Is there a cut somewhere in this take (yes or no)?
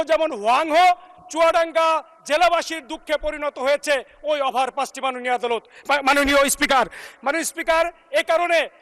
no